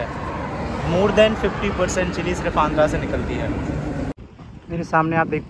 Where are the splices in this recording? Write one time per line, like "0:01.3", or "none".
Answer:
0:04.1